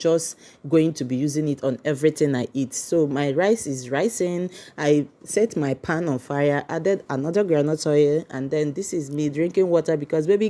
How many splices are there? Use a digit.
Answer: 0